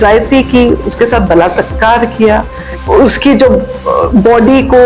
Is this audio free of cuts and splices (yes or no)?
yes